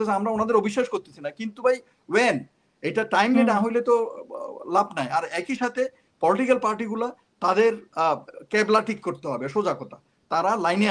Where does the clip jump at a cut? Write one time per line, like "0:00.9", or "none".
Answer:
none